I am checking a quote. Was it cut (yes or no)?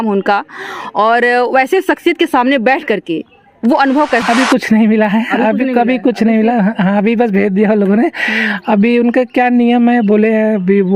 yes